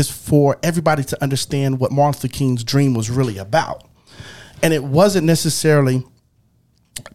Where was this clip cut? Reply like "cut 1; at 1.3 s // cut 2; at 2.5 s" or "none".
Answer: none